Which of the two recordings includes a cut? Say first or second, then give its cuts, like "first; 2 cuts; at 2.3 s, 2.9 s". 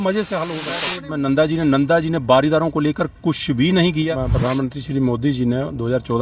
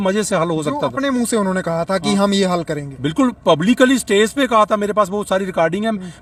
first; 2 cuts; at 0.9 s, 4.1 s